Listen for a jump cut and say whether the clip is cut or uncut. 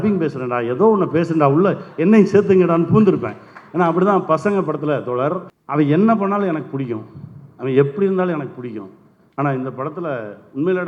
cut